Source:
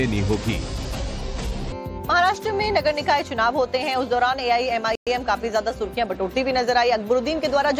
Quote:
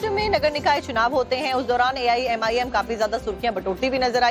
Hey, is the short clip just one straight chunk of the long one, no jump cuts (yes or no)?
no